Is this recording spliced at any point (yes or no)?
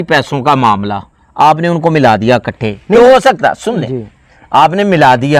no